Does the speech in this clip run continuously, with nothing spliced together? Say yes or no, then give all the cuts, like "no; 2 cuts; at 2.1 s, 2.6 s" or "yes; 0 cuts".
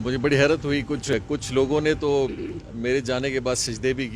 no; 1 cut; at 1.1 s